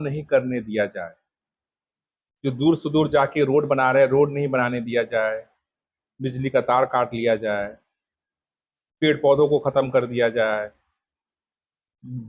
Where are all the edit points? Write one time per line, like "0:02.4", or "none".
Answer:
none